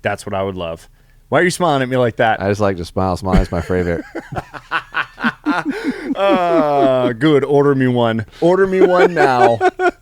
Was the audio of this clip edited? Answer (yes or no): no